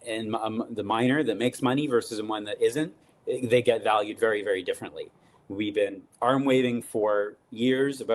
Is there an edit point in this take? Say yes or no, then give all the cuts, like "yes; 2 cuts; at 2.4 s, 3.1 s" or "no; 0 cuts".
yes; 1 cut; at 5.3 s